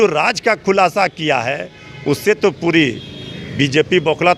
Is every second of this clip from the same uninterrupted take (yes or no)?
yes